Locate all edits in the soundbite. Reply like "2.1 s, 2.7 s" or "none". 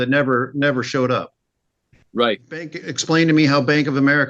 2.8 s